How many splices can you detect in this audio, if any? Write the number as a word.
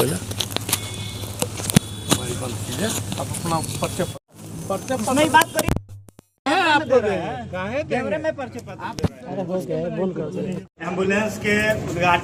zero